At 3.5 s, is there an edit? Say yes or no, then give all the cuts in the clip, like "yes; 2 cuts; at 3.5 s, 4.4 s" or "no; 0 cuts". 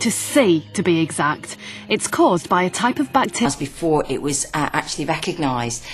no; 0 cuts